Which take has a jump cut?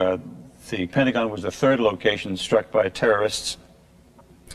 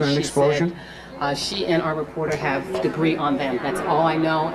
first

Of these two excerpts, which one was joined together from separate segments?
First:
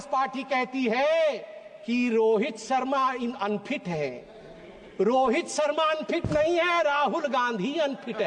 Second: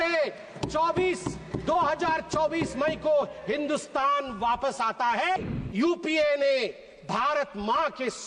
second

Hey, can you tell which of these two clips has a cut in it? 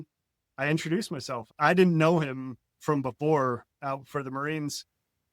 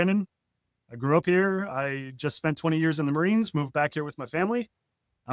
first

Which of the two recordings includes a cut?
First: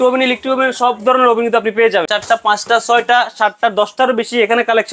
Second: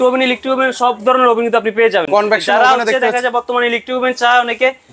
first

